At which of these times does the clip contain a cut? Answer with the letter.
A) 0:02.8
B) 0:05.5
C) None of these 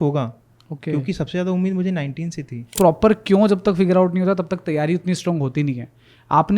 A